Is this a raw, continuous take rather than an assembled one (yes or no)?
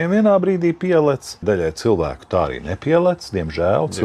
no